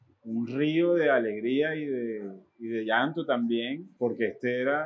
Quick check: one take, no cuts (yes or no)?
no